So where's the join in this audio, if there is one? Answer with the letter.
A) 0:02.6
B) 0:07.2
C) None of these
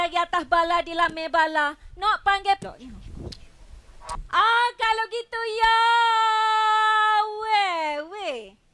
A